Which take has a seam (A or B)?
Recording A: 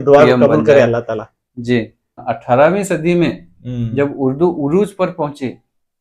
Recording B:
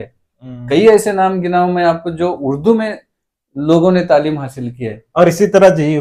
A